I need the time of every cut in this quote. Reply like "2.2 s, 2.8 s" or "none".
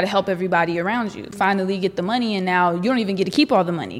1.3 s